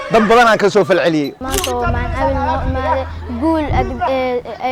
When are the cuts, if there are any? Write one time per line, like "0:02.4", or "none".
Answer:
0:01.4